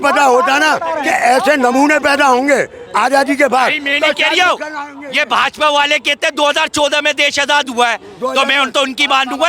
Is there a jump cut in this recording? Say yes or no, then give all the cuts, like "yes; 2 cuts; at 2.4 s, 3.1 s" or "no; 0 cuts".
no; 0 cuts